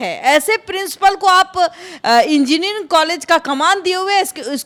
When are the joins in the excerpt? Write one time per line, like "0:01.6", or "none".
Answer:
none